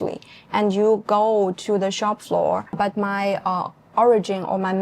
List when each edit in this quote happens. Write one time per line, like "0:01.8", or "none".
0:02.7